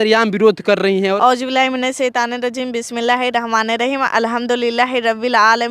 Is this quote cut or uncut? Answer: cut